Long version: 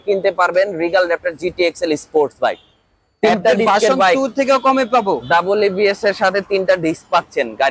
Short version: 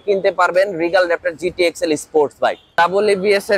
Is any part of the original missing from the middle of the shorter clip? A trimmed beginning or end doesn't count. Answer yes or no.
yes